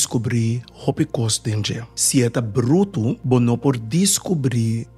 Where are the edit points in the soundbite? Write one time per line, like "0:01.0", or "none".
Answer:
0:01.9
0:03.2